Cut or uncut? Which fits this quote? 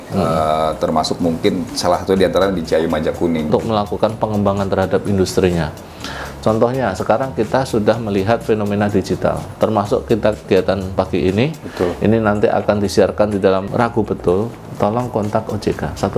cut